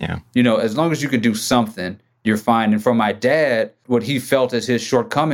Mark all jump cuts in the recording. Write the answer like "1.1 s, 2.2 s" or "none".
3.8 s